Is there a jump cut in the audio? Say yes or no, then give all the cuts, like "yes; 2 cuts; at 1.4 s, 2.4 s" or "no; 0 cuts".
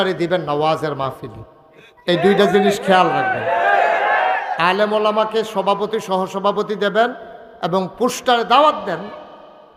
no; 0 cuts